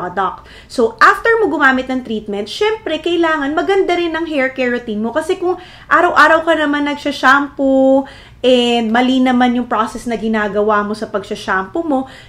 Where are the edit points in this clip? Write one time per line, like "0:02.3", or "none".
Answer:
none